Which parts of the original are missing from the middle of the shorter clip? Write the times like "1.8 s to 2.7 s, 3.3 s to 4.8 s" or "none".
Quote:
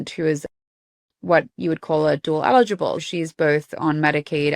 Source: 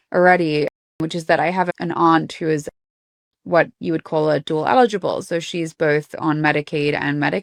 5.3 s to 5.4 s